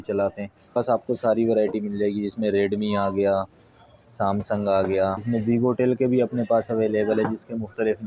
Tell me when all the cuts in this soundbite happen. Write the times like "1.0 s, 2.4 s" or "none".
0.8 s, 5.2 s